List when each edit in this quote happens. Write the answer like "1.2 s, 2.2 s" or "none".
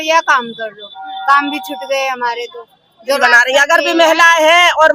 3.2 s